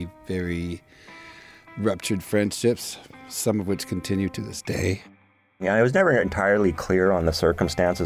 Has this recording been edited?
yes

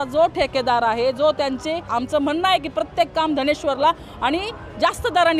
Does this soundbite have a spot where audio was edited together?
yes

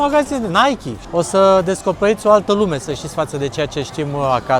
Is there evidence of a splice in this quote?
yes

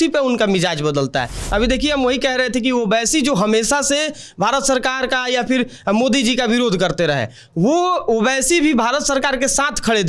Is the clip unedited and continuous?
yes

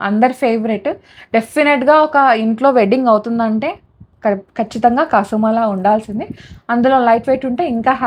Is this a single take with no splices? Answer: yes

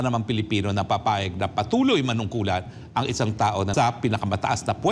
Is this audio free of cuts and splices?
no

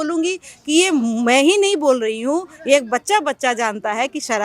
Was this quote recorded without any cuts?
yes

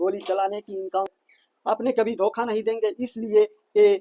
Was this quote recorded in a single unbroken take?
no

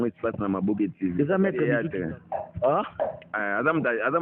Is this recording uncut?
no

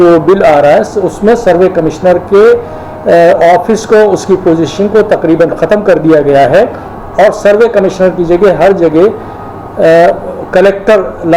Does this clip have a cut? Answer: no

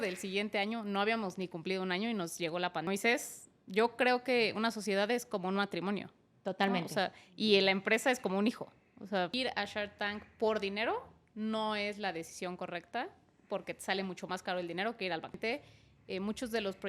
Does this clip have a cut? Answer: yes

